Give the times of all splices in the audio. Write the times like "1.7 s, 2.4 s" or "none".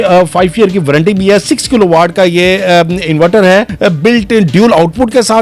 3.7 s